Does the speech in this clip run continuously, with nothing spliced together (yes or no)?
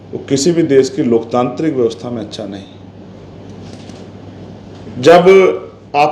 yes